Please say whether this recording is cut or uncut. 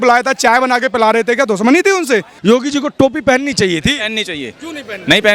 cut